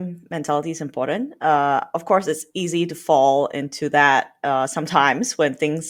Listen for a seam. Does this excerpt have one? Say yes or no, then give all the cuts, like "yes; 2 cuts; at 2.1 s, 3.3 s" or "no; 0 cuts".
no; 0 cuts